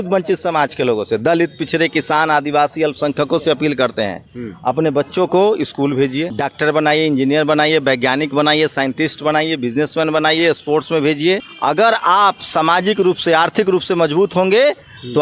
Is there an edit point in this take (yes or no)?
no